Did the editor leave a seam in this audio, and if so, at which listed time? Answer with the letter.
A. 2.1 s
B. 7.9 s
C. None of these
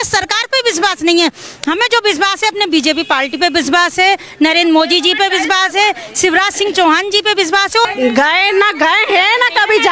B